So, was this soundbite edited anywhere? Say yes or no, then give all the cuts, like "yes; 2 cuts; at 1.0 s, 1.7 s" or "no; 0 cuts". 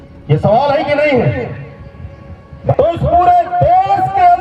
yes; 1 cut; at 2.6 s